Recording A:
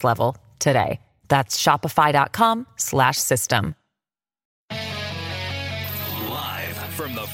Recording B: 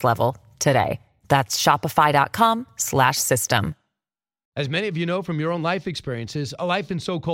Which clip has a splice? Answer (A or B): A